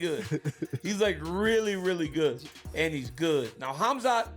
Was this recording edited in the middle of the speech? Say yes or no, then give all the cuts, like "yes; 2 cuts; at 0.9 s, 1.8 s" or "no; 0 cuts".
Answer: no; 0 cuts